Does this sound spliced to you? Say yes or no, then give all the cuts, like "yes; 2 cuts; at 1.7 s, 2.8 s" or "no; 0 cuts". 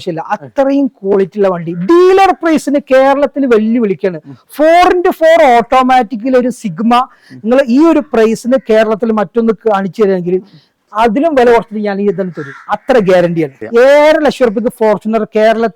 yes; 1 cut; at 13.6 s